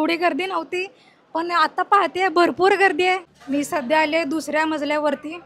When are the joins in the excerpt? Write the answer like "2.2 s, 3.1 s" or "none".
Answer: 3.3 s